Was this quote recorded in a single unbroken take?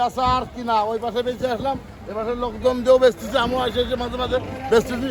yes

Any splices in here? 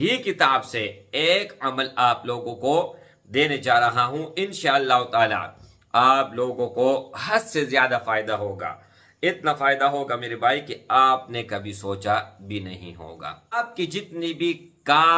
yes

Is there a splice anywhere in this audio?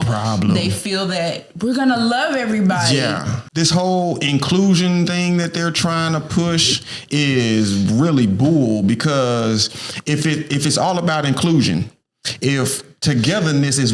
yes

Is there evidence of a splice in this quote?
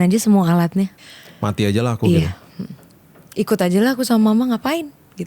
yes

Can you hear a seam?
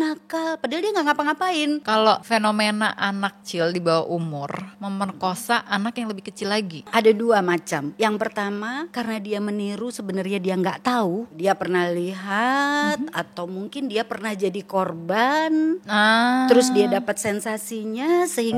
yes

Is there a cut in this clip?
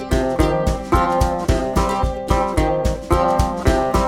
yes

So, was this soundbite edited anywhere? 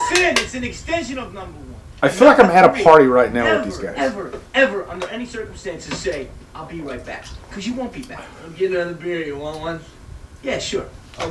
no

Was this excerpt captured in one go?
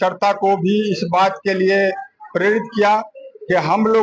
yes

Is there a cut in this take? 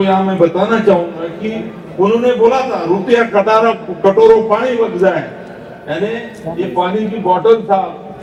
no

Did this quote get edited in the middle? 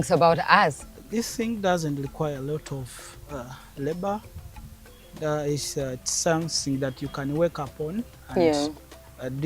yes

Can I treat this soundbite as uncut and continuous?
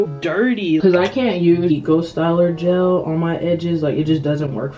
no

